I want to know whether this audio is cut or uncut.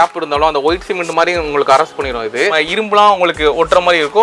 cut